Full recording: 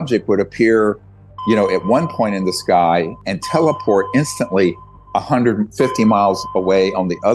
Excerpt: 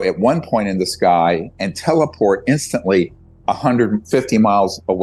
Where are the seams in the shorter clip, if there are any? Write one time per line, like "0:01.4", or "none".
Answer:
none